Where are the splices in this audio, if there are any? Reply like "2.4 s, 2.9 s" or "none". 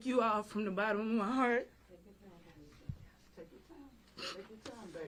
none